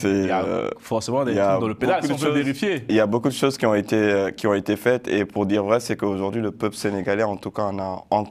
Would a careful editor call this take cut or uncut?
uncut